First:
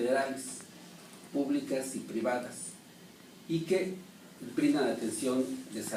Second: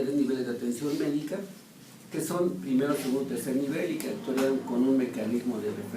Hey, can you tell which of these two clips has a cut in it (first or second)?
second